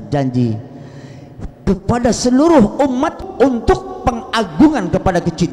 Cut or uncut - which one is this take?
uncut